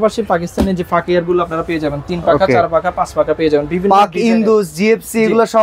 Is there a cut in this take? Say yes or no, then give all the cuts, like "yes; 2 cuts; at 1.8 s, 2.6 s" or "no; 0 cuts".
no; 0 cuts